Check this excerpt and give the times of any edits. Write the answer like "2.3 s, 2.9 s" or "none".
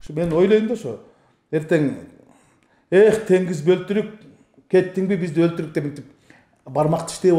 none